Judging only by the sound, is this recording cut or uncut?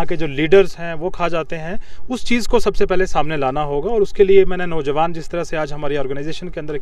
uncut